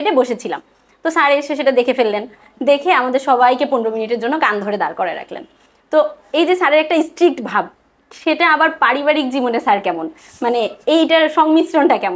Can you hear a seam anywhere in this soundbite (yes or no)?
no